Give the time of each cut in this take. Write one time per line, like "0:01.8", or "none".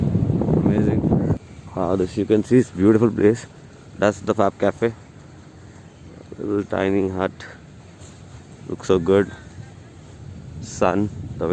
none